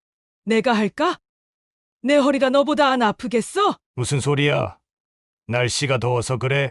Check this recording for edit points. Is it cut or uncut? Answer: cut